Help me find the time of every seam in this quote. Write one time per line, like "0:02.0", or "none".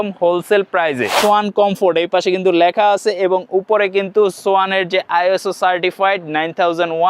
0:01.2